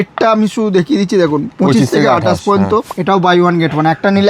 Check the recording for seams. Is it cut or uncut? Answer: cut